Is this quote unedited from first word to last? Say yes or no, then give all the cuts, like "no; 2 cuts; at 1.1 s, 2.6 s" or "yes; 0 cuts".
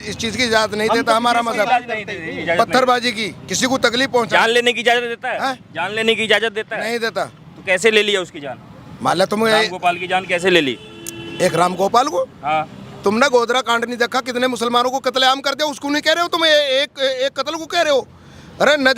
yes; 0 cuts